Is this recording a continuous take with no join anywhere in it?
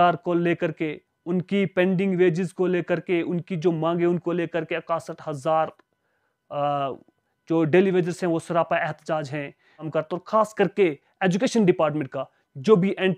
no; 1 cut; at 9.9 s

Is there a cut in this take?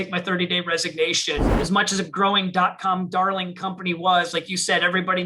yes; 1 cut; at 1.5 s

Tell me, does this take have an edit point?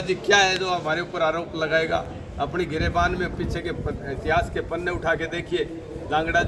no; 0 cuts

